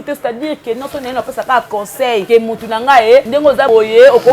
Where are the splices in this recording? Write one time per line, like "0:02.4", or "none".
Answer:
0:02.2
0:03.5